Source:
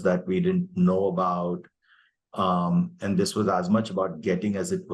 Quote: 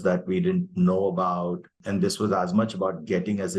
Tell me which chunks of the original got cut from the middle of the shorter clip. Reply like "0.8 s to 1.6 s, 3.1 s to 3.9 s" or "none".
1.8 s to 3.0 s